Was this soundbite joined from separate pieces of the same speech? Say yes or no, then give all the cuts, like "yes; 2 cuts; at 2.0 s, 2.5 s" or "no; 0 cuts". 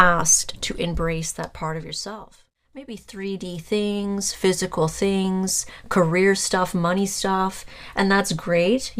yes; 1 cut; at 3.0 s